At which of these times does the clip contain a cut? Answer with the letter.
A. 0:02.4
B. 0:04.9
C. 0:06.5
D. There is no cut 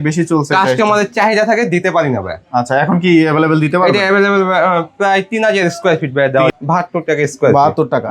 C